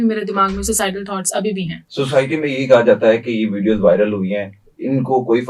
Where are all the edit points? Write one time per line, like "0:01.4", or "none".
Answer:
0:01.8